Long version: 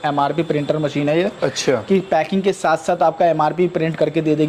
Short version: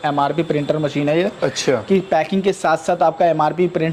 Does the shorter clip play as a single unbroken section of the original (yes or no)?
yes